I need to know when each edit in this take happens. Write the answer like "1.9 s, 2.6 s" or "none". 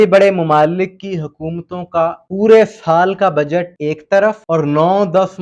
2.2 s, 3.7 s, 4.4 s